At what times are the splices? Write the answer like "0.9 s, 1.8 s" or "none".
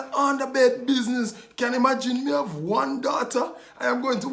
none